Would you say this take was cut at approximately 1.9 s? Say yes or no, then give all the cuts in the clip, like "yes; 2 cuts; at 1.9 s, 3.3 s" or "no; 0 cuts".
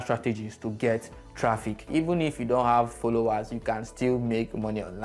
yes; 1 cut; at 1.9 s